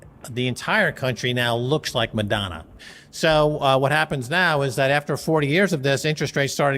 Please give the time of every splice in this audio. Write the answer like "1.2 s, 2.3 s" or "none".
2.7 s